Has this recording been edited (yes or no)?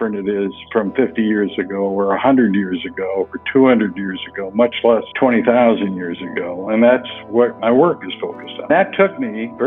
yes